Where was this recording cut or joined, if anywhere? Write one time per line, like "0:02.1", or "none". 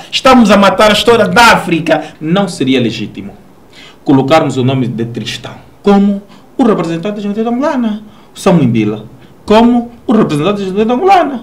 0:02.1